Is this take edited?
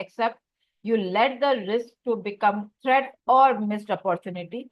yes; 1 cut; at 2.7 s

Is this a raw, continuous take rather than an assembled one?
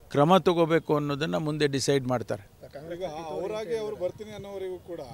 yes; 0 cuts

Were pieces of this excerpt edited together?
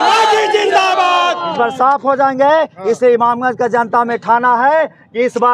no; 0 cuts

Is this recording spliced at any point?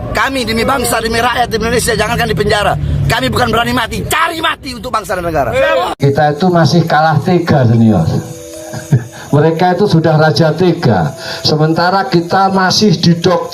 yes; 1 cut; at 6.0 s

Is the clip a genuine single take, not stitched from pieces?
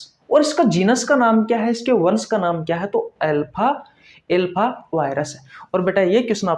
yes; 0 cuts

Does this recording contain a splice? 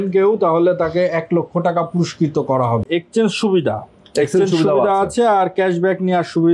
yes; 1 cut; at 2.8 s

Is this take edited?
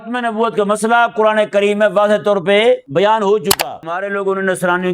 yes; 2 cuts; at 2.9 s, 4.0 s

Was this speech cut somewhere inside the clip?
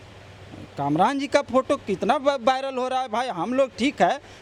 no; 0 cuts

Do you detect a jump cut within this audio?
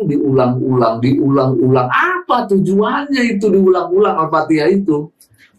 no; 0 cuts

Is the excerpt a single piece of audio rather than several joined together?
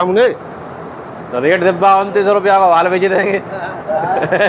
yes; 0 cuts

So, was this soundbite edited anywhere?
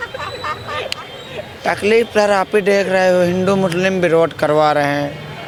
no; 0 cuts

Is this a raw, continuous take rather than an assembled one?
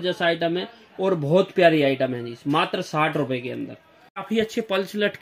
no; 1 cut; at 4.2 s

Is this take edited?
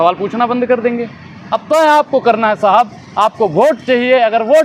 no; 0 cuts

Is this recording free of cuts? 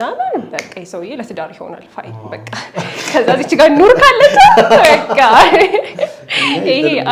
yes; 0 cuts

